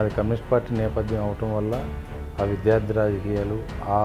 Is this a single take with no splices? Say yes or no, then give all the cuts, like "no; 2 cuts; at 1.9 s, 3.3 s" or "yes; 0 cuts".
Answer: yes; 0 cuts